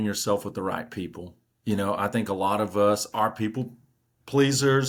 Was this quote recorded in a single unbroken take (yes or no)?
yes